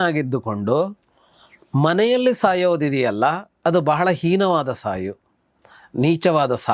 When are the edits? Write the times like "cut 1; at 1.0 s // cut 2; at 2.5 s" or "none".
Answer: none